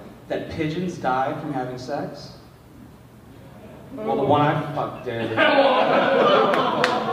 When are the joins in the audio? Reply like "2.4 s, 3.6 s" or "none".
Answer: none